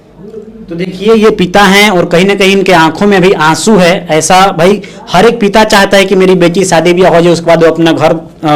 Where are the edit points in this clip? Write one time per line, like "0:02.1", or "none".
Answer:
none

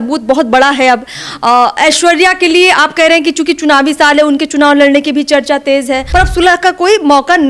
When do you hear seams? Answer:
0:06.0

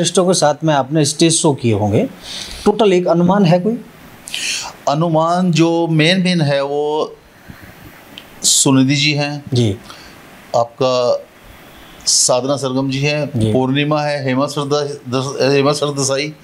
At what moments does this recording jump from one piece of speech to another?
none

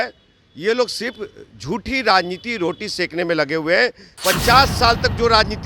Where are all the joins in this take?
0:04.1

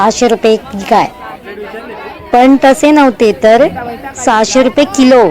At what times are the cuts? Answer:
none

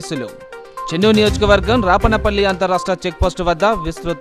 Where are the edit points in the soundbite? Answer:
none

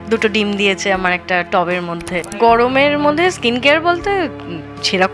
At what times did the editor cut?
0:02.3

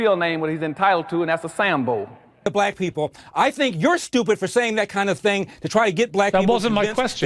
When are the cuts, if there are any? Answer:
0:02.5

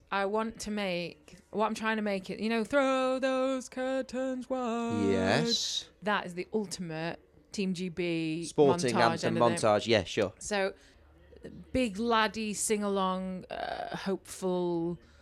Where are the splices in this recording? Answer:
0:10.9

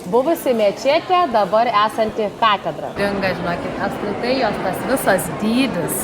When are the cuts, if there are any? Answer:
0:02.9

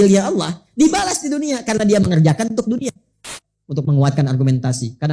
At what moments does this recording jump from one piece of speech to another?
0:03.4

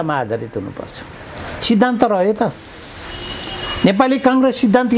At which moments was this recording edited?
none

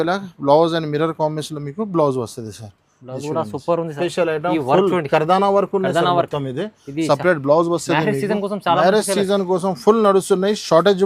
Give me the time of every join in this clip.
0:03.9

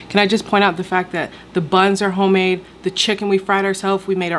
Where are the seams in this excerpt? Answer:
none

